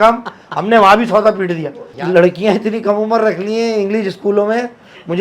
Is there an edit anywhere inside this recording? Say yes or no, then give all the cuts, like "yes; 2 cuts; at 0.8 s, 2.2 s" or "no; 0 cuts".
yes; 1 cut; at 2.0 s